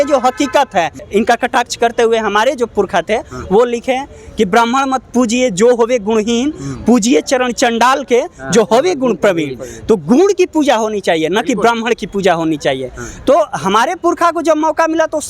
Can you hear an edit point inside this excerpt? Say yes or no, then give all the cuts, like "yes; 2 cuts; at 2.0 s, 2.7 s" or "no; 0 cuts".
yes; 1 cut; at 1.0 s